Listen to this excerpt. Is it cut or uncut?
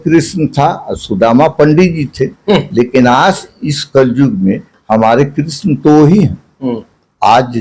uncut